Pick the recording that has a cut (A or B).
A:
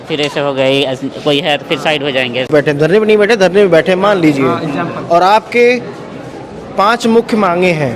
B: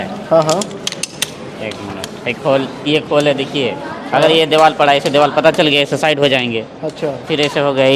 A